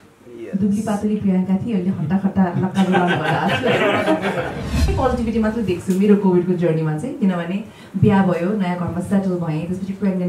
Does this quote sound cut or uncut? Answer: cut